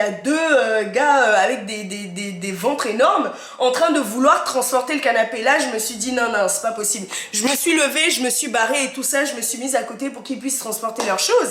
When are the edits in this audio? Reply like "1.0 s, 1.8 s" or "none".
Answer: none

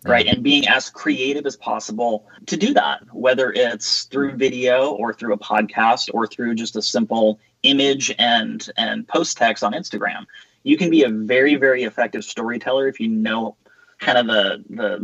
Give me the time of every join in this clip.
2.4 s

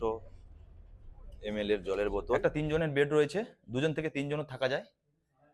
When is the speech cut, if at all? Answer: 2.4 s

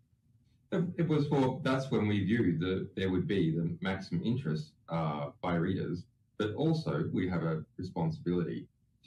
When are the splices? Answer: none

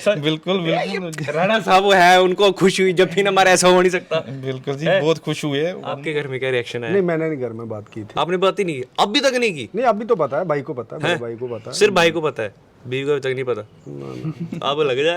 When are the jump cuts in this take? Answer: 5.9 s

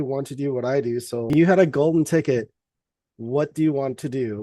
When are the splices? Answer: 1.3 s

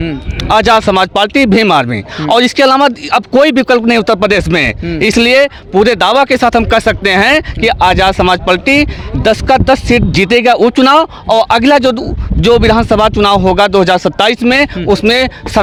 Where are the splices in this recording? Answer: none

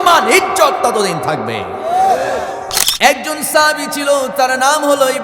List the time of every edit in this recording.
2.8 s

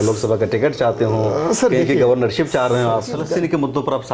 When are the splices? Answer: 3.2 s

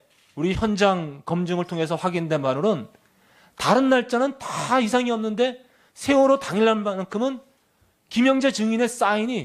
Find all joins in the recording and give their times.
6.9 s

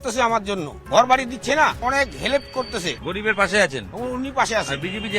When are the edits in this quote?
1.8 s

